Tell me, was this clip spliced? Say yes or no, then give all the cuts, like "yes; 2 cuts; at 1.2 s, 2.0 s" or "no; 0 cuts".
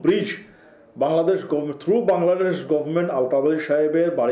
no; 0 cuts